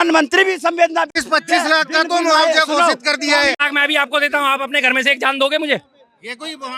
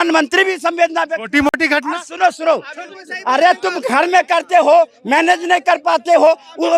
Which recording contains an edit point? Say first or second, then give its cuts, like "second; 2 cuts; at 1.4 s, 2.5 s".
first; 2 cuts; at 1.2 s, 3.5 s